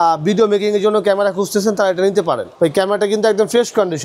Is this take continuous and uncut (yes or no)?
no